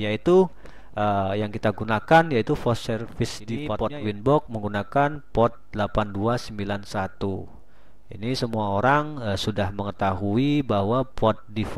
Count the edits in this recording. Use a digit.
1